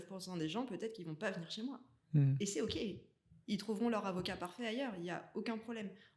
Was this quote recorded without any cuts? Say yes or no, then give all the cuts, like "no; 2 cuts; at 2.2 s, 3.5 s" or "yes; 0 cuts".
yes; 0 cuts